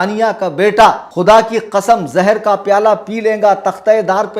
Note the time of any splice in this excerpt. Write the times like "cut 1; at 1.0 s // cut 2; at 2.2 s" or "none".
cut 1; at 1.1 s